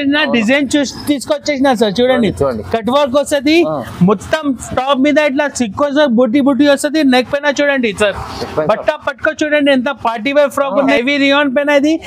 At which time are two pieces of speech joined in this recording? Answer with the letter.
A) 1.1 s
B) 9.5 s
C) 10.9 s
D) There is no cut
C